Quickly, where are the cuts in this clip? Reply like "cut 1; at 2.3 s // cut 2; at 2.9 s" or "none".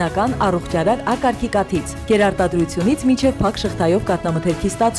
none